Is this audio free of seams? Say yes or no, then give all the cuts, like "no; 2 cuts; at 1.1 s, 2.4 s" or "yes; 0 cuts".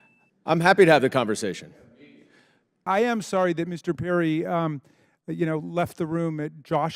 no; 1 cut; at 2.9 s